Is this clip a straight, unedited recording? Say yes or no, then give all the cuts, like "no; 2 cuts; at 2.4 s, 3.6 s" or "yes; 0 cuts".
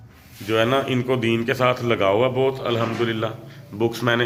yes; 0 cuts